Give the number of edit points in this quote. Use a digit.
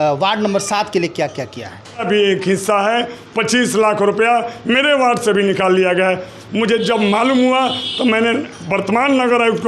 1